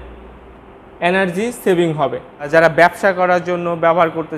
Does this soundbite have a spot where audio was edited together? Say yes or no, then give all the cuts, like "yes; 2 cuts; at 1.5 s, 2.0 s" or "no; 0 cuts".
yes; 1 cut; at 2.5 s